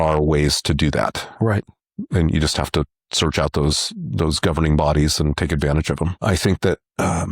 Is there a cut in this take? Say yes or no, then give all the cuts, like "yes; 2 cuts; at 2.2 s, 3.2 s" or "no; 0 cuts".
yes; 1 cut; at 6.1 s